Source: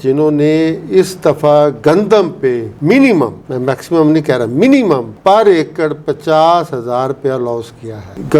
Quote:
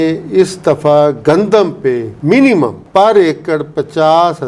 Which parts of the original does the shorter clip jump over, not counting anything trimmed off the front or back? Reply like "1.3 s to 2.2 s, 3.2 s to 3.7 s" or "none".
3.4 s to 5.1 s